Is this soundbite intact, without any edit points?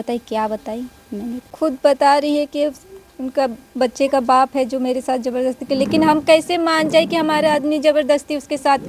no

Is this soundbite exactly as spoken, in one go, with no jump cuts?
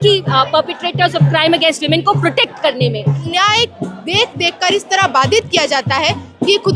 no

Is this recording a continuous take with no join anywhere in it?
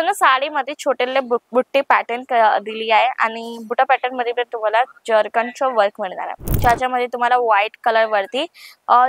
no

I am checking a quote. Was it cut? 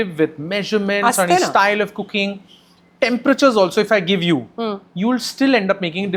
no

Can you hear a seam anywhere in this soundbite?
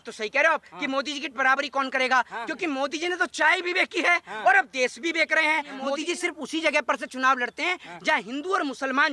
yes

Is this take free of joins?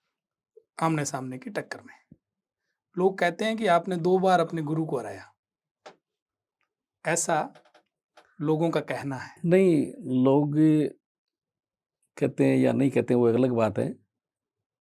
yes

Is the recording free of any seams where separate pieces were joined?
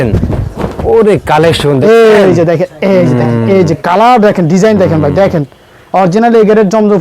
yes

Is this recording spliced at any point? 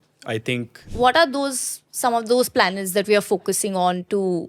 yes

